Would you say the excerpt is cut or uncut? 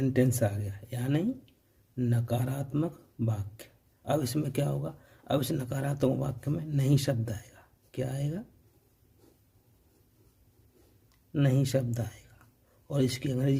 uncut